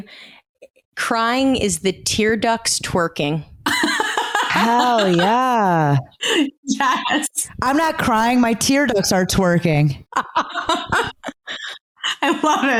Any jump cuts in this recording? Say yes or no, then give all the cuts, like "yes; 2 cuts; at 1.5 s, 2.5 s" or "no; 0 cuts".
no; 0 cuts